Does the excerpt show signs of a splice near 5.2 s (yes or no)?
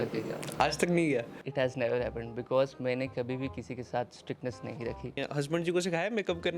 yes